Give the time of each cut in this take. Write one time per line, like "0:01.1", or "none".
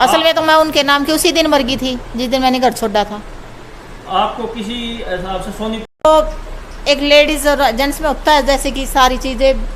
0:06.0